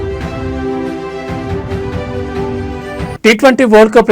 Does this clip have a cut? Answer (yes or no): yes